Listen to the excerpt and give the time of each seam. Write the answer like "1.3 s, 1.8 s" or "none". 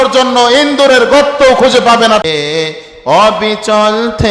2.2 s